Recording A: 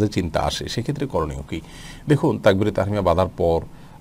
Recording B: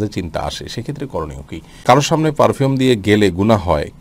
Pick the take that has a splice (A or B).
B